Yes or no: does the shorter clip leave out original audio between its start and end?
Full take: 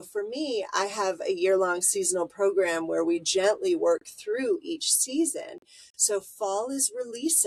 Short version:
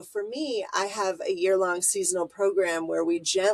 no